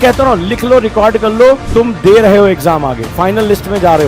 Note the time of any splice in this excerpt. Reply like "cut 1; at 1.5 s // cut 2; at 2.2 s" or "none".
cut 1; at 1.6 s